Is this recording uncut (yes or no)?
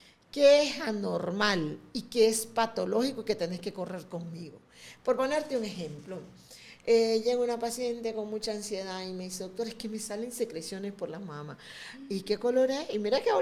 yes